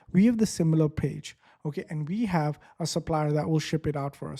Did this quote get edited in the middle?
no; 0 cuts

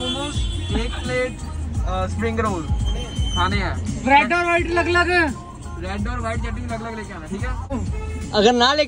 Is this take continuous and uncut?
yes; 0 cuts

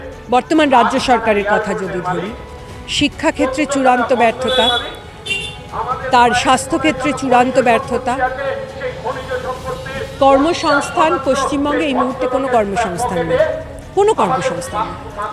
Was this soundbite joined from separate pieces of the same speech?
no; 0 cuts

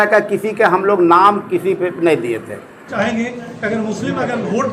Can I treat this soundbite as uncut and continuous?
no; 1 cut; at 2.9 s

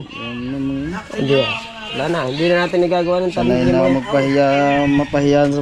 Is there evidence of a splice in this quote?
no; 0 cuts

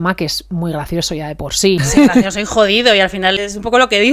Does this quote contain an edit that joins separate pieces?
yes; 2 cuts; at 1.8 s, 3.4 s

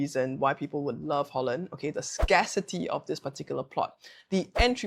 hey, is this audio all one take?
yes; 0 cuts

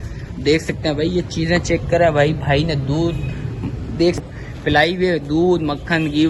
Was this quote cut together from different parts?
yes; 1 cut; at 4.2 s

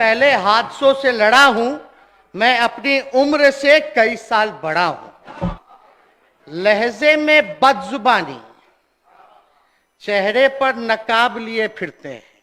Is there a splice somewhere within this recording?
yes; 1 cut; at 5.6 s

